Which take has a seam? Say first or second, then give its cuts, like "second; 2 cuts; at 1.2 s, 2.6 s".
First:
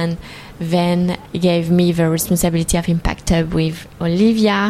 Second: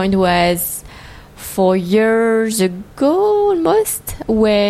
first; 1 cut; at 1.2 s